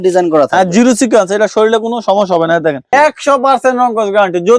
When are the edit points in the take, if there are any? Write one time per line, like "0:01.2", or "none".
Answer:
0:02.9